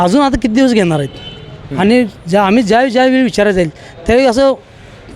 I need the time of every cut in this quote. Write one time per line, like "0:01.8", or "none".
none